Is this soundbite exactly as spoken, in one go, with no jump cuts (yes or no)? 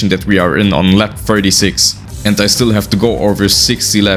yes